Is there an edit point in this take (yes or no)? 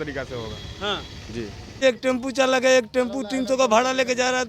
yes